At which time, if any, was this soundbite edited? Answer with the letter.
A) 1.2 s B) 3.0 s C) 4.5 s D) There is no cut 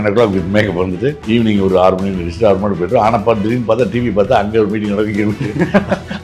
A